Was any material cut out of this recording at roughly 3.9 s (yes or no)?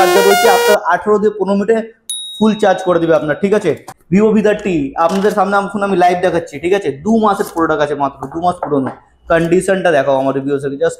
yes